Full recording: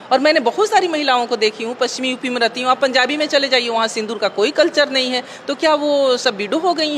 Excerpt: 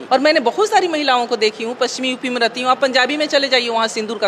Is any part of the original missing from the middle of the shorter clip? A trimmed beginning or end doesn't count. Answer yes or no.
no